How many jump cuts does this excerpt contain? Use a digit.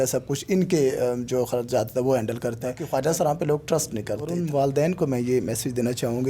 2